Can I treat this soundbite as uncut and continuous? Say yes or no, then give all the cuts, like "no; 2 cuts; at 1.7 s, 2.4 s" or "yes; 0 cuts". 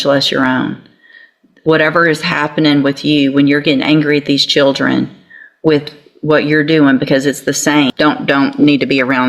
no; 1 cut; at 7.9 s